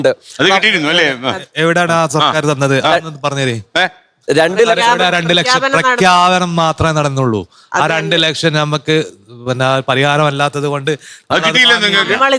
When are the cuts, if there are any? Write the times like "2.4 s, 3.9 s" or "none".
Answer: 7.6 s